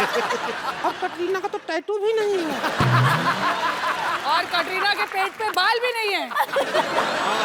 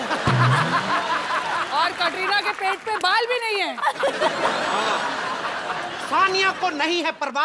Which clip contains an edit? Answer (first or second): second